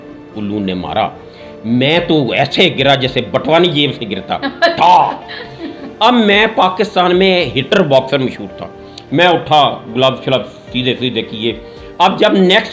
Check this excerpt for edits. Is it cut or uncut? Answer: uncut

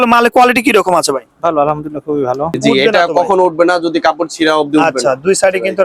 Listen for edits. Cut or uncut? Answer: cut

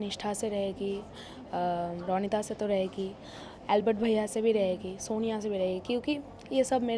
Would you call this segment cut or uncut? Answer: uncut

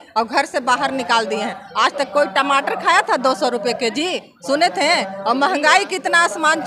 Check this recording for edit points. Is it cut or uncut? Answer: uncut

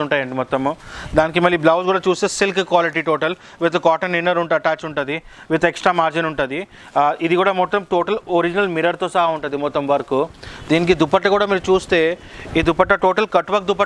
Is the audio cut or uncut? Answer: uncut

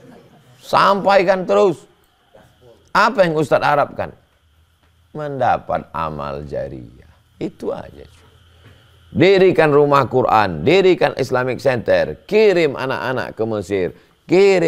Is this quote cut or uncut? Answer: uncut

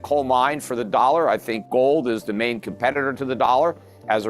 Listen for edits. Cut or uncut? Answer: cut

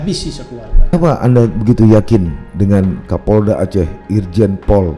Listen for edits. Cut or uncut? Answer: cut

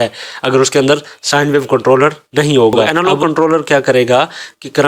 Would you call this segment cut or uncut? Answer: cut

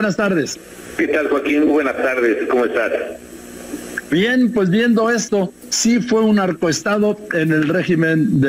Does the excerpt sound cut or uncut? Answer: uncut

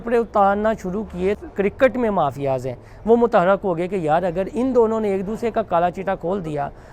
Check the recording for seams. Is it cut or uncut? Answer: cut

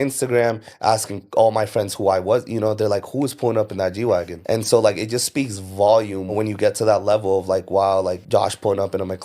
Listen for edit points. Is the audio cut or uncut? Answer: cut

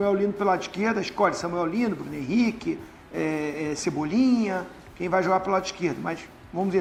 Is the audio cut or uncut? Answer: uncut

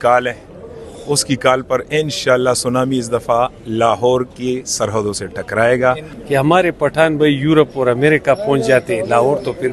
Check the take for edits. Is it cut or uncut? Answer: cut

